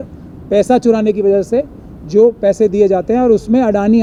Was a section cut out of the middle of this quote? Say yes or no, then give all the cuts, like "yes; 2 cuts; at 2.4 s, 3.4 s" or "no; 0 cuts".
no; 0 cuts